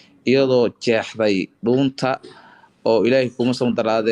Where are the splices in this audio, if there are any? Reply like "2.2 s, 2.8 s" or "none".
none